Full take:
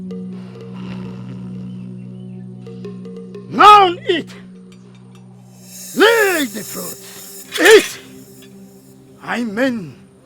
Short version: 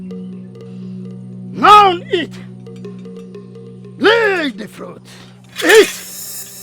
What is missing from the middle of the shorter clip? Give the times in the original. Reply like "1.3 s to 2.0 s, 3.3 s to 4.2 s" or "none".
1.5 s to 3.5 s